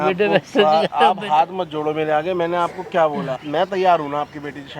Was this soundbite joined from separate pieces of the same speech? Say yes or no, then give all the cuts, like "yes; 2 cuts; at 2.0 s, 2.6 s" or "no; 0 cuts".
yes; 1 cut; at 3.4 s